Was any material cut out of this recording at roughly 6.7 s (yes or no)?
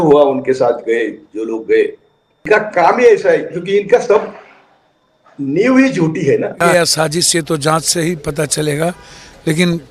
yes